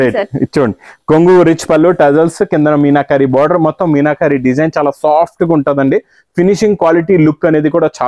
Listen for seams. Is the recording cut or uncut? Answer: uncut